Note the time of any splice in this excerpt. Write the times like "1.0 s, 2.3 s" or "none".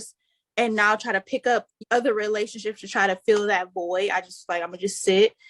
1.8 s